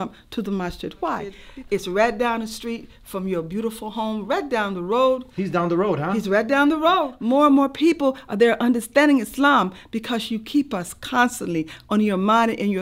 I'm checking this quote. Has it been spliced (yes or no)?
yes